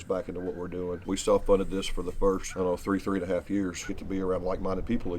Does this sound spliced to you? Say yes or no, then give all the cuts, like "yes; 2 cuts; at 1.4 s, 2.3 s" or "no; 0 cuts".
yes; 3 cuts; at 1.0 s, 2.5 s, 3.9 s